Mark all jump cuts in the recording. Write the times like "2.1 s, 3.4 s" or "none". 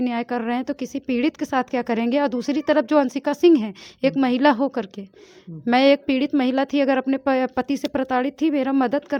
none

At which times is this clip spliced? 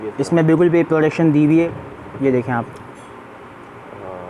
1.7 s

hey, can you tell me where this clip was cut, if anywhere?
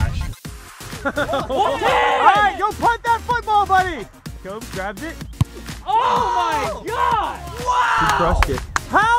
none

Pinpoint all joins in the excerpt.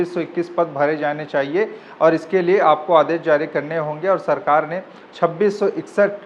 none

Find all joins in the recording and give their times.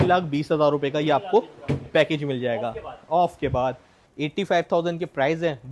4.0 s

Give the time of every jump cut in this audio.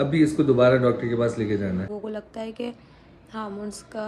1.9 s

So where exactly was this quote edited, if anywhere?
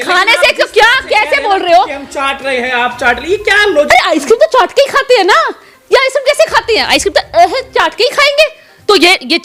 none

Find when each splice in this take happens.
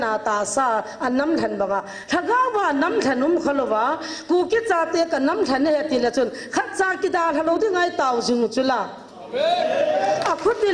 none

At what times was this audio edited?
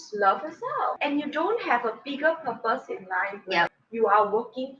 1.0 s, 3.8 s

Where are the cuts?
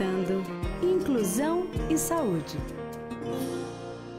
2.5 s

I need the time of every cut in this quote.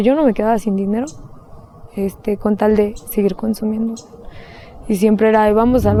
none

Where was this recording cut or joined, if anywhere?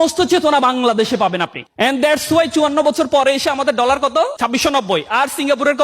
1.6 s, 4.3 s

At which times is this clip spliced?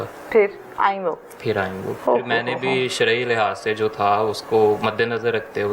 1.9 s

